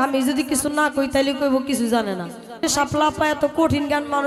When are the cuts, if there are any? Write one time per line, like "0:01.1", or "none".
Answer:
0:02.6